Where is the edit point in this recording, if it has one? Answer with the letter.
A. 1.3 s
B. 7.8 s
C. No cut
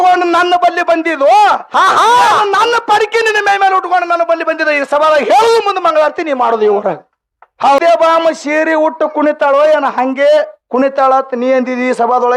B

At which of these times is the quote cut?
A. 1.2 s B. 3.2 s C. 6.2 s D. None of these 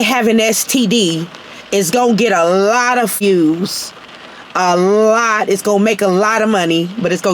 B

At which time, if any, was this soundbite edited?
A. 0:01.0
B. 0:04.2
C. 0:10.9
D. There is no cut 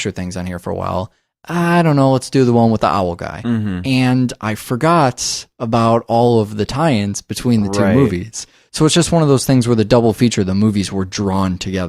C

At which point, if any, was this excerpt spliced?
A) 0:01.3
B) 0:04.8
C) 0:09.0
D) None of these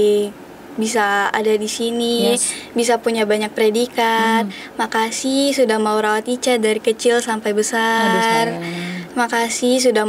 D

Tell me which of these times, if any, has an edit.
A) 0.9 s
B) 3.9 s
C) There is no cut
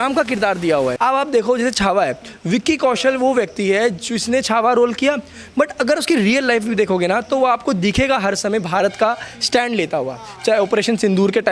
A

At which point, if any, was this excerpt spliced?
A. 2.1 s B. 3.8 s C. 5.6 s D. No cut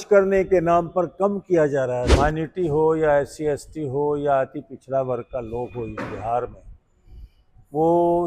A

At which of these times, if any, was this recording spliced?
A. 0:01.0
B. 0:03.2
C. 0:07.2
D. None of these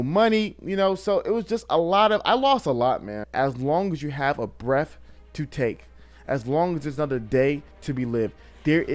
B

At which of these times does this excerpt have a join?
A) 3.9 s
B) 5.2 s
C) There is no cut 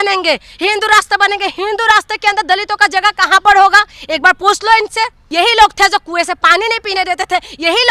B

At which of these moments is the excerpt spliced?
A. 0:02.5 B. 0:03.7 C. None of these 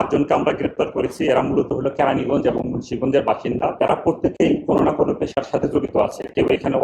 B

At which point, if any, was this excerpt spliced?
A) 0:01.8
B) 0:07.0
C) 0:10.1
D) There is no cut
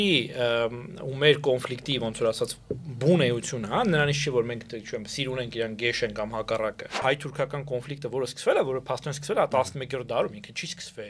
B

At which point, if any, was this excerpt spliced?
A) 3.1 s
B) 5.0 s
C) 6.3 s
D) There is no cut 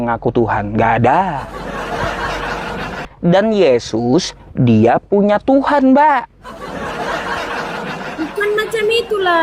A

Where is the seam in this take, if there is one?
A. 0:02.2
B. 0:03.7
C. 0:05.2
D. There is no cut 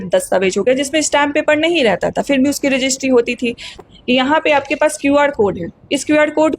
B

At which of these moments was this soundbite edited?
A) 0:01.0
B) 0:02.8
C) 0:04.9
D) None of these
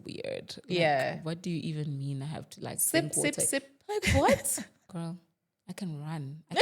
C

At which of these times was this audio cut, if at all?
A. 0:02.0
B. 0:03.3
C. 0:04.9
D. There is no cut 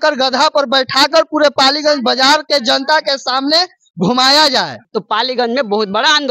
C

